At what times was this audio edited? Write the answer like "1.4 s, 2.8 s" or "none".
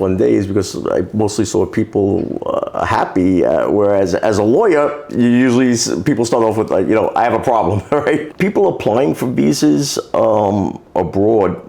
8.3 s